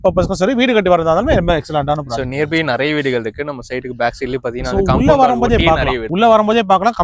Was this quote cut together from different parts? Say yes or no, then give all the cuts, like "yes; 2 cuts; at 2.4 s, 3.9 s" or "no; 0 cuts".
yes; 1 cut; at 6.0 s